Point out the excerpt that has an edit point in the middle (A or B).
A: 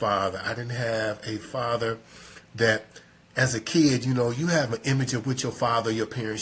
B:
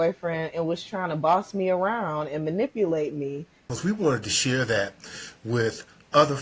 B